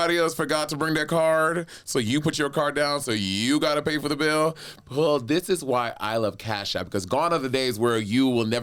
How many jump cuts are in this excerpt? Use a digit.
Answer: 0